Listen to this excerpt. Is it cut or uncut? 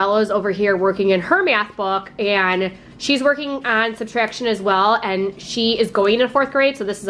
uncut